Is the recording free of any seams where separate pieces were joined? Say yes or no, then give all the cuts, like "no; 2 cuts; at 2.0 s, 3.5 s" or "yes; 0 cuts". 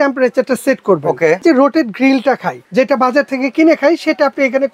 no; 2 cuts; at 1.4 s, 2.6 s